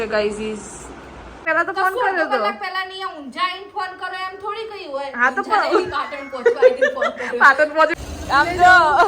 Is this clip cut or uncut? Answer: cut